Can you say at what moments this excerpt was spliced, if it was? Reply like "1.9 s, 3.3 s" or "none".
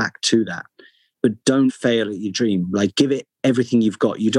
1.8 s